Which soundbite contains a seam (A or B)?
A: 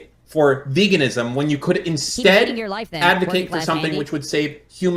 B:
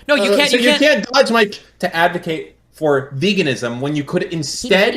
B